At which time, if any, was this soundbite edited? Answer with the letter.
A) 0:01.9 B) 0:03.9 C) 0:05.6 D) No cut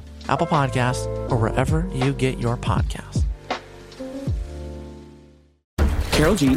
C